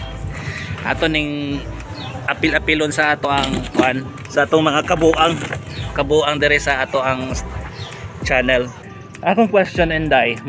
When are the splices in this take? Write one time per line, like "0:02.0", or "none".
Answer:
0:09.0